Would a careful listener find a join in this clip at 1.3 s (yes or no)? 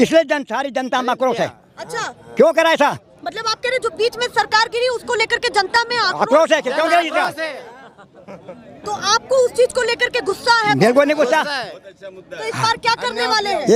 no